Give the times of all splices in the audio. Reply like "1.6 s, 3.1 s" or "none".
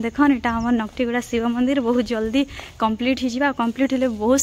none